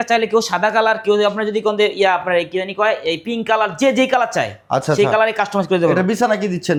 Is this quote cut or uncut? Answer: uncut